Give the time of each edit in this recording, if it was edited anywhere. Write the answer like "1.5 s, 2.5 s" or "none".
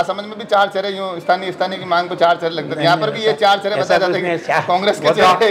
none